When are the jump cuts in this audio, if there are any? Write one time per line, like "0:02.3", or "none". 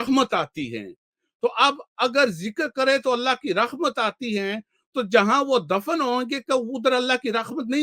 none